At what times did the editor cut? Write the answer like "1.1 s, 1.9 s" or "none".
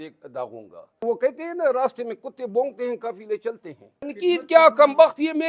1.0 s, 4.1 s